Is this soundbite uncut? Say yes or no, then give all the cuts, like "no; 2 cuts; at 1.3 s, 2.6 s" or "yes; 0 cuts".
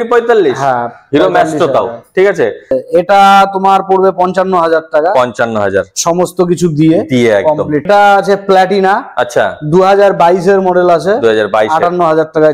no; 2 cuts; at 2.7 s, 7.9 s